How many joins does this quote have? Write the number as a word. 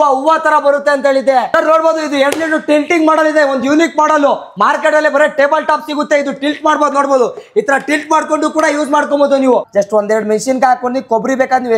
two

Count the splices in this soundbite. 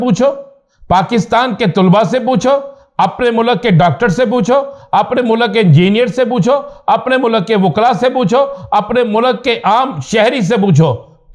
zero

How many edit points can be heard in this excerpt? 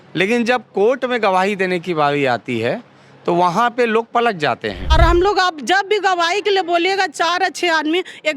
one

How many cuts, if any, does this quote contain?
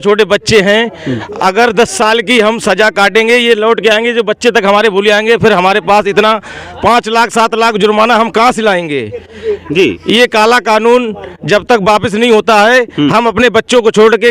zero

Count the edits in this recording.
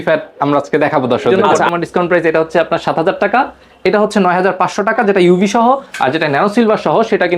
one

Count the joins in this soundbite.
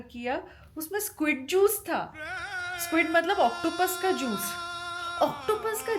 zero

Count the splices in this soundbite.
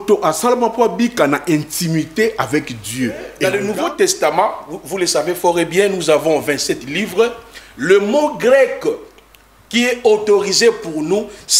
one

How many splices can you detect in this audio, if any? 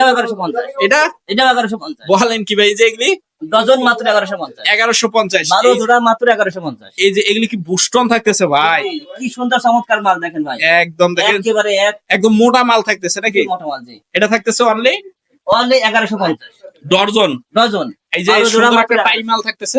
zero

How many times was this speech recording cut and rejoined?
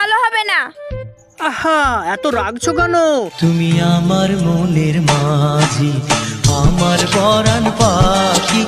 one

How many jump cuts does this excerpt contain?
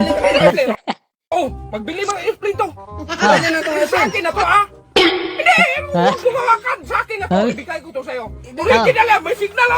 one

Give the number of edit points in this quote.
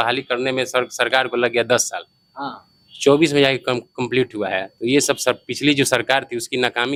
zero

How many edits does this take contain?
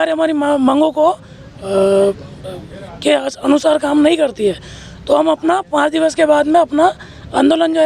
zero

